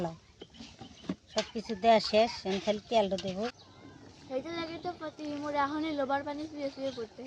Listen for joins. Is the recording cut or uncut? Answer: cut